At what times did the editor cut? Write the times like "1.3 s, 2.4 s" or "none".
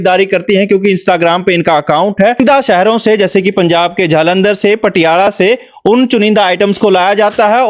2.4 s